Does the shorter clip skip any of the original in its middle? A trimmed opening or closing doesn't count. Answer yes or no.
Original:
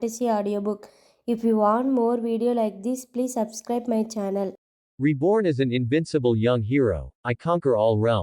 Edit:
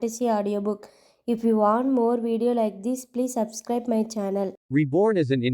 yes